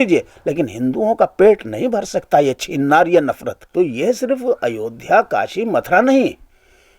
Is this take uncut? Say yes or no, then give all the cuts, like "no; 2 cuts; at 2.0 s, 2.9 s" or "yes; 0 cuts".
no; 1 cut; at 3.5 s